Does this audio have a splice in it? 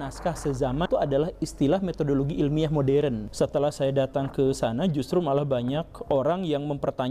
yes; 2 cuts; at 0.9 s, 3.2 s

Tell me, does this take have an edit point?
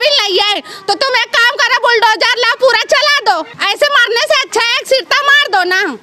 yes; 1 cut; at 3.6 s

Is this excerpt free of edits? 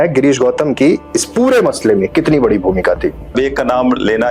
no; 1 cut; at 3.3 s

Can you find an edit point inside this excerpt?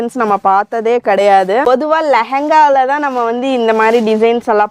yes; 1 cut; at 1.7 s

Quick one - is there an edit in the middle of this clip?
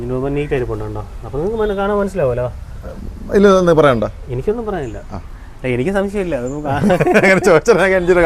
no; 0 cuts

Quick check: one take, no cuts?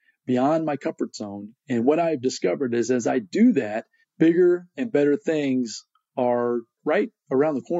no; 1 cut; at 6.8 s

